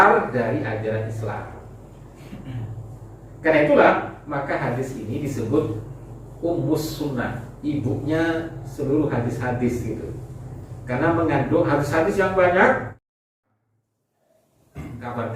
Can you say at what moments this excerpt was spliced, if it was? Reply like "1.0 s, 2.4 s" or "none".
13.3 s